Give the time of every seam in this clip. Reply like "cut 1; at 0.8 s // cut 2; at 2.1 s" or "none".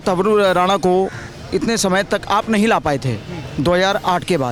none